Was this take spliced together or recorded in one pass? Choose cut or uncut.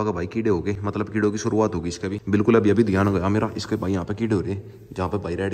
uncut